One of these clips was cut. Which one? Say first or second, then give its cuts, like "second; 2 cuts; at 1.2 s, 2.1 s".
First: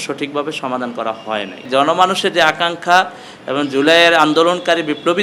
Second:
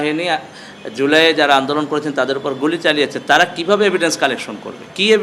first; 1 cut; at 1.6 s